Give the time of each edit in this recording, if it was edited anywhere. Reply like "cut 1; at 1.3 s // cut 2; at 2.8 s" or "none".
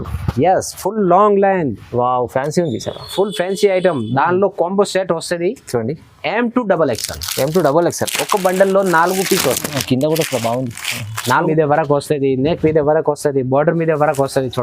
cut 1; at 11.5 s